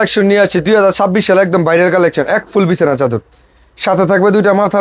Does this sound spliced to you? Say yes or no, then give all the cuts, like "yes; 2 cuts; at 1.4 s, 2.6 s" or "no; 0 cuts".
no; 0 cuts